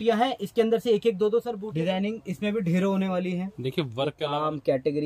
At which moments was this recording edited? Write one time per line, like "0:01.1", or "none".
0:01.6
0:04.1

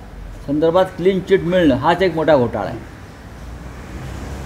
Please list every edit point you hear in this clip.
none

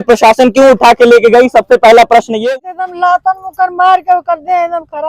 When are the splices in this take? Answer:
0:02.5

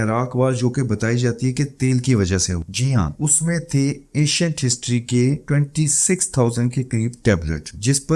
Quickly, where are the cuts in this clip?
0:02.7

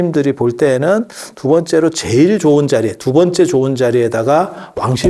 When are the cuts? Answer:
none

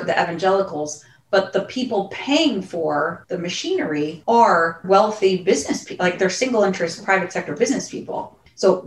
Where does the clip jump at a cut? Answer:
0:03.2
0:04.2
0:04.8

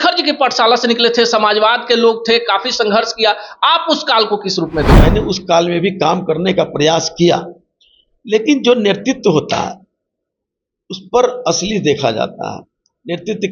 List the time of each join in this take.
0:05.0

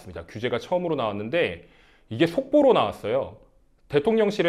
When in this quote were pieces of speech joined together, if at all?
none

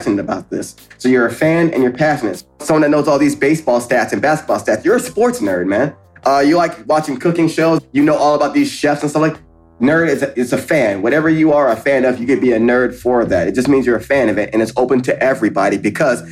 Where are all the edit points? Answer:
0:02.5
0:07.8
0:09.6

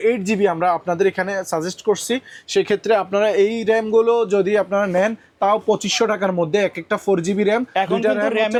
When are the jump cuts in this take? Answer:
none

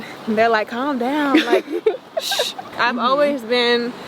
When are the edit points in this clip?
0:02.7

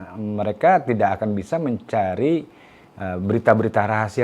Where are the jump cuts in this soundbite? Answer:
none

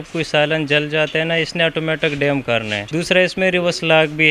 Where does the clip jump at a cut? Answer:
0:02.8

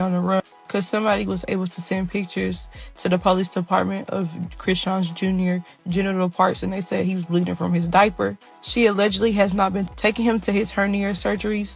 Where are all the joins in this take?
none

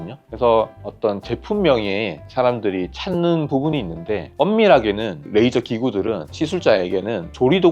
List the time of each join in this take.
none

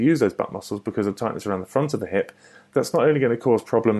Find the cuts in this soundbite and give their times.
0:02.5

